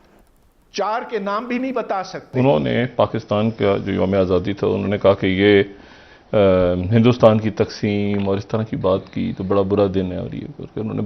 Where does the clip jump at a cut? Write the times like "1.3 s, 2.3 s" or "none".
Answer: 2.2 s